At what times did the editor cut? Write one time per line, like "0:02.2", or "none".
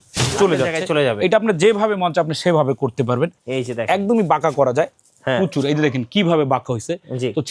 none